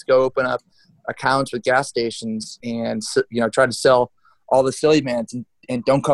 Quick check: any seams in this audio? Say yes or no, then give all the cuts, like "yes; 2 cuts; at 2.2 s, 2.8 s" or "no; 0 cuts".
no; 0 cuts